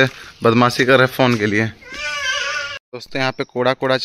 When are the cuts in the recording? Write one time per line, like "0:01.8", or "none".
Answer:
0:02.8